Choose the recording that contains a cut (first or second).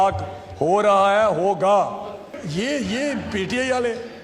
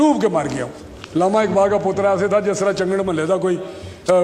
first